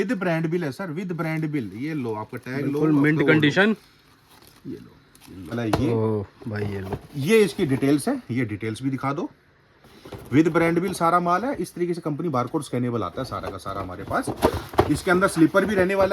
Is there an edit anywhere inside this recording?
yes; 1 cut; at 5.5 s

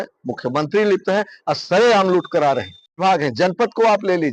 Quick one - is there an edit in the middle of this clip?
yes; 1 cut; at 3.0 s

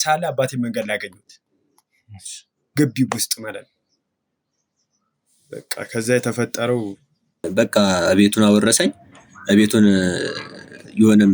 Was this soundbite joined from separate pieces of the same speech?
yes; 1 cut; at 7.5 s

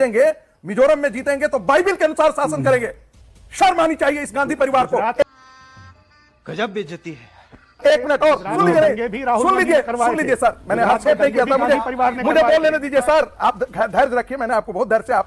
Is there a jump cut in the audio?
no; 0 cuts

